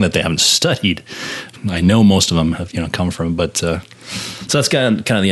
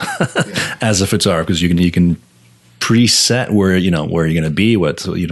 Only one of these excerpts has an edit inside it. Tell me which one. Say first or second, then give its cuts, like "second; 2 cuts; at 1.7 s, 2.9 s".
first; 1 cut; at 1.5 s